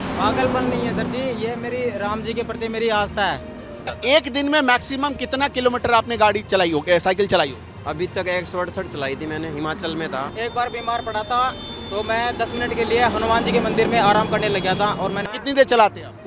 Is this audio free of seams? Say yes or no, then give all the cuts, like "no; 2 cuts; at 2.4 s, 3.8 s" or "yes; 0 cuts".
no; 3 cuts; at 3.9 s, 10.3 s, 15.2 s